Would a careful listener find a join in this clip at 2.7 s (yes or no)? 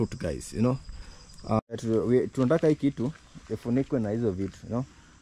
no